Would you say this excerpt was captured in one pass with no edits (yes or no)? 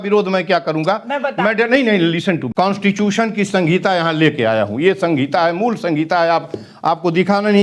no